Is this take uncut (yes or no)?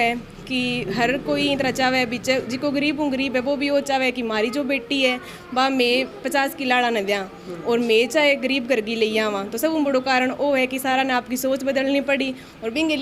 yes